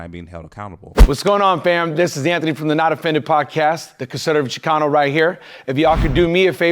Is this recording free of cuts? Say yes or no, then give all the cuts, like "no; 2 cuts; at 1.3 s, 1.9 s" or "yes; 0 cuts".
no; 1 cut; at 1.1 s